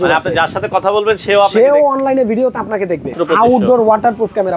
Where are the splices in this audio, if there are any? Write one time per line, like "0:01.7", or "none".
0:03.1